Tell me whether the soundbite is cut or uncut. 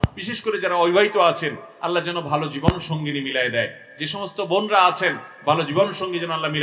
uncut